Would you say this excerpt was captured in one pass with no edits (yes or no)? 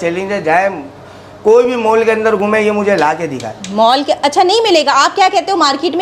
yes